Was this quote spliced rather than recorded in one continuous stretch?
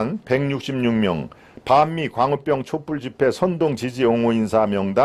no; 0 cuts

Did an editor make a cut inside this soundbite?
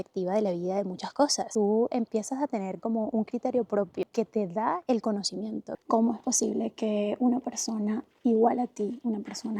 yes; 2 cuts; at 4.0 s, 5.7 s

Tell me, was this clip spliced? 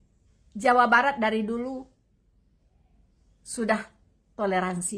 no; 0 cuts

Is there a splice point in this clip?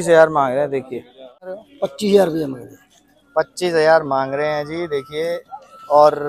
yes; 1 cut; at 1.6 s

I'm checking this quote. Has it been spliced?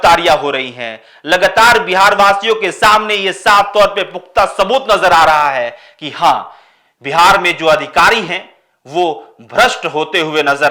no; 0 cuts

